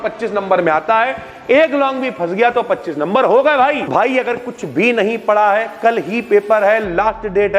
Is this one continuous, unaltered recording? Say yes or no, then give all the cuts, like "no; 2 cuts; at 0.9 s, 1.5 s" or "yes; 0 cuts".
no; 1 cut; at 3.9 s